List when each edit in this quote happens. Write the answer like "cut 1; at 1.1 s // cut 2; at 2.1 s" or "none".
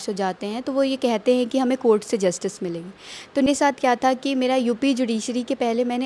cut 1; at 3.5 s